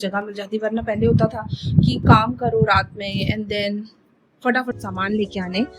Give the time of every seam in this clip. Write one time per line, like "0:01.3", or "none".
0:04.7